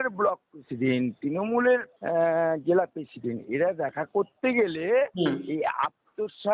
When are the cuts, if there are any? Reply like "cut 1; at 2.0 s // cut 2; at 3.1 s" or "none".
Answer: cut 1; at 1.9 s